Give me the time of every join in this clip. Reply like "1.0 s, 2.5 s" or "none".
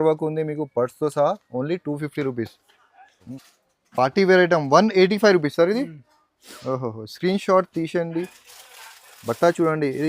3.3 s